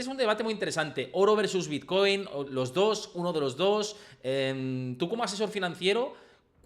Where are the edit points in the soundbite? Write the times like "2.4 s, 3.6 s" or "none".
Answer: none